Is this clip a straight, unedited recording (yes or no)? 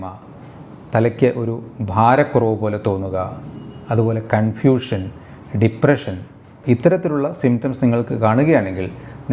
no